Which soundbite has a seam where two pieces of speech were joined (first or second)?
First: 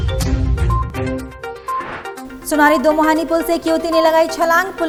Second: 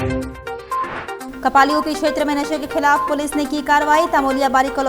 second